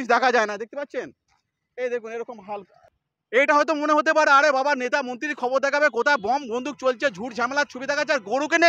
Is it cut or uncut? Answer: cut